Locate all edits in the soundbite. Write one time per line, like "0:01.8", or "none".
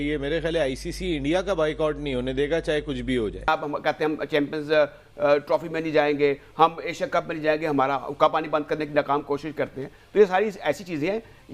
0:03.5